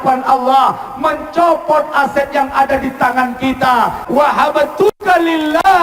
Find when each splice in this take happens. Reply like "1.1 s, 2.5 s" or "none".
4.0 s